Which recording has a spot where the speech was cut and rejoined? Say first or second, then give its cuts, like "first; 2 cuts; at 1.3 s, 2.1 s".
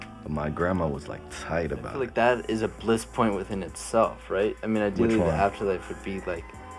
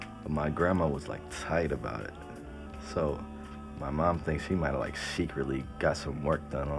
first; 1 cut; at 2.0 s